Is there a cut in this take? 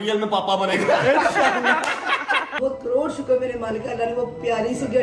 yes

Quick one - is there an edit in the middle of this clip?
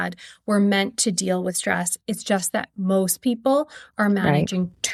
no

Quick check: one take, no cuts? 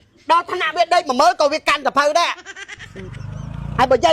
no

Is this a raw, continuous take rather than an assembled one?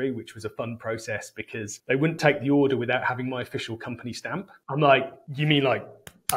no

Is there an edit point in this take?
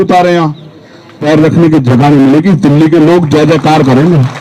yes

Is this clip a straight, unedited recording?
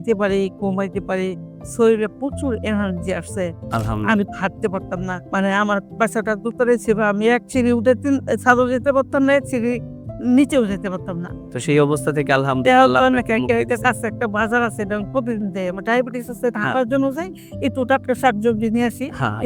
no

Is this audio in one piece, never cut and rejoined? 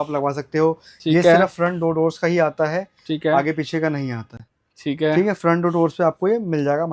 yes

